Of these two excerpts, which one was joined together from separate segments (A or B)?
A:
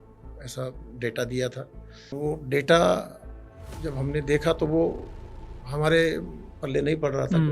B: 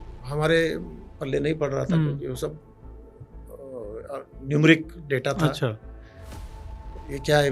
A